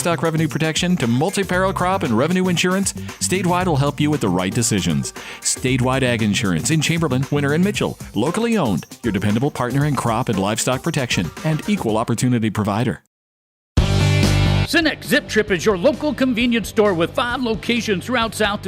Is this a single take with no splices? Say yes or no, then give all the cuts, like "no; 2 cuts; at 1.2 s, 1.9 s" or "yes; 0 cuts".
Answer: no; 1 cut; at 13.1 s